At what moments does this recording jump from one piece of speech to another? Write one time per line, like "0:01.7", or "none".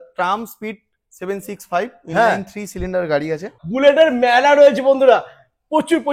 0:03.6